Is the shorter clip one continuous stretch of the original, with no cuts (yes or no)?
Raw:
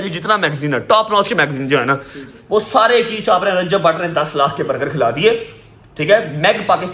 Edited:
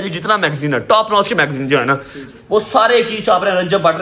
yes